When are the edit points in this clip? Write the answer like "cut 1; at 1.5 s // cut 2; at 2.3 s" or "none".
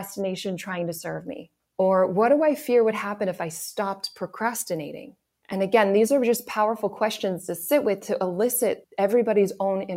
none